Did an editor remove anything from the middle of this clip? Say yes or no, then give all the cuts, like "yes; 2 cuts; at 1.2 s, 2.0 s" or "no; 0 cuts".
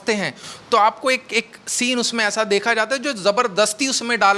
no; 0 cuts